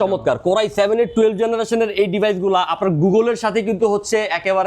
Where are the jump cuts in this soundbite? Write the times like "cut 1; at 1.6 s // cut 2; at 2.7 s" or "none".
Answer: none